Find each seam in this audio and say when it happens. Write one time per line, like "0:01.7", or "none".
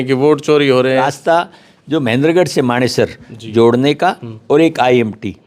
0:01.0